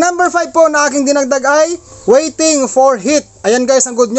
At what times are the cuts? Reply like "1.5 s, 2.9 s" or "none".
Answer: 1.9 s